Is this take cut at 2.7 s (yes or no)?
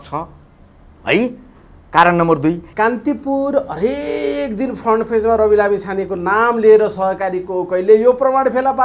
yes